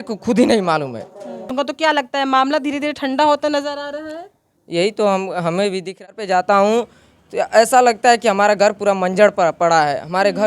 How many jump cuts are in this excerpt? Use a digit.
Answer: 2